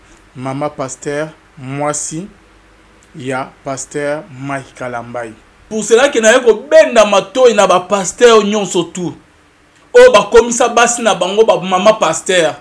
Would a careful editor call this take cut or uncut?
cut